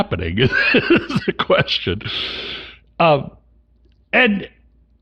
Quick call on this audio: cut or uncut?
uncut